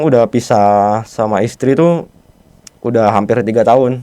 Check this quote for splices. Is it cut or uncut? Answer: uncut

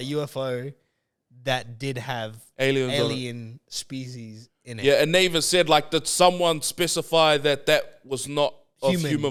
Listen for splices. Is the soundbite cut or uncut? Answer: uncut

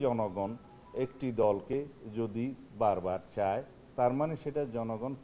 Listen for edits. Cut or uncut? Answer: uncut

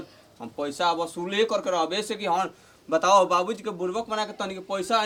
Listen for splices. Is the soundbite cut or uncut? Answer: uncut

